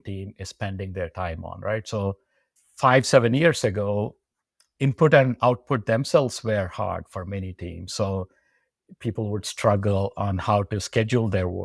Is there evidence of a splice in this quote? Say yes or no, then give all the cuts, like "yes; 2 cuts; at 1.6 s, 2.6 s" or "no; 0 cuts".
no; 0 cuts